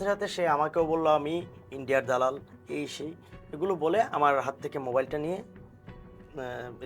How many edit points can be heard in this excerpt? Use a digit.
0